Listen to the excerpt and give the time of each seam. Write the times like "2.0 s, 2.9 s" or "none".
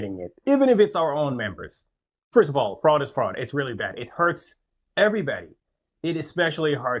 none